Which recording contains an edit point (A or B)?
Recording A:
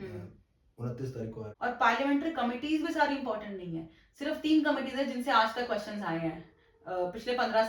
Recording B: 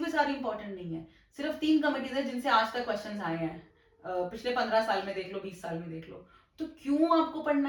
A